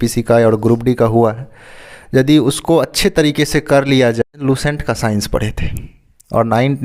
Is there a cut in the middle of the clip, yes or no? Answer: yes